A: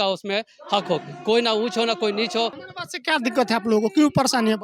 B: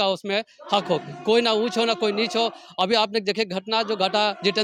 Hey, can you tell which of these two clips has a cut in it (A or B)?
A